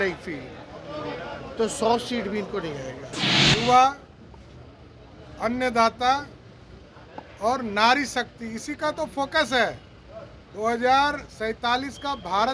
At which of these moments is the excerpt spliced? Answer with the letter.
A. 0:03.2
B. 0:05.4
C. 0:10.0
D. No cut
A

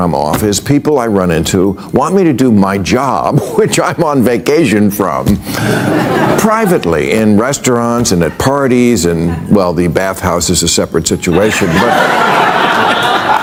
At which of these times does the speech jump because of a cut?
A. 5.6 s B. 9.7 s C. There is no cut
C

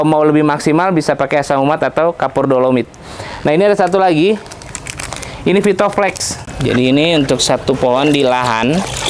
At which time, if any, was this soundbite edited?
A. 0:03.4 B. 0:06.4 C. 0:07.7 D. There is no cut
B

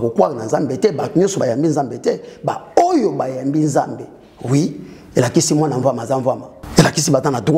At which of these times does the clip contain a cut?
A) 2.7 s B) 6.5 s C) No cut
B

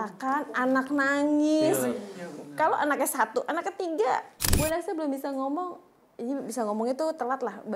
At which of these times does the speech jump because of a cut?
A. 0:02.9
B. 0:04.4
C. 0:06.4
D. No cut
B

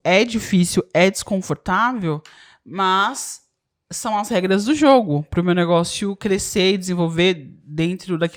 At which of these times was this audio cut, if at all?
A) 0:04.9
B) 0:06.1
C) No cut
C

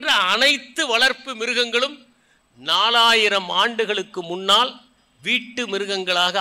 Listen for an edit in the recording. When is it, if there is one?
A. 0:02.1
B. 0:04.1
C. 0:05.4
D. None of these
D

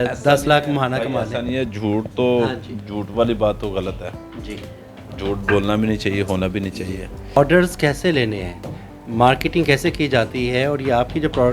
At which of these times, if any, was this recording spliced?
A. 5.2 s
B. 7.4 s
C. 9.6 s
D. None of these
B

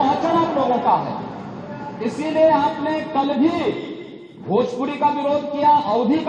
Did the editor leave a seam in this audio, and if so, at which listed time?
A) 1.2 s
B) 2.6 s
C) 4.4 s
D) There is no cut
D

